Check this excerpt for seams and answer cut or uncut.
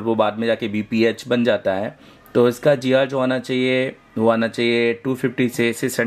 uncut